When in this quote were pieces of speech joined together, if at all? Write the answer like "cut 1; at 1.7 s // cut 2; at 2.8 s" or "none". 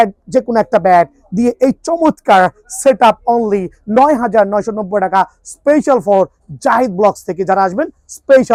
none